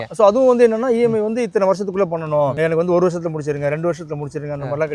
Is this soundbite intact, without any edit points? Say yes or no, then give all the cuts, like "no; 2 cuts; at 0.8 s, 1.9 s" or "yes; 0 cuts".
no; 1 cut; at 2.5 s